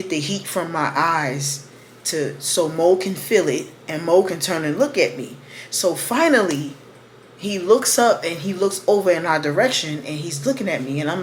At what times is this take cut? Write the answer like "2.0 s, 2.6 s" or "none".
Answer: none